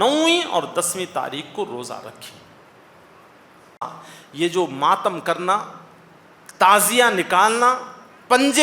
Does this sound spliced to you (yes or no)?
yes